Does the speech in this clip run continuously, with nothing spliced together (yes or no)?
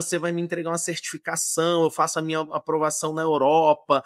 yes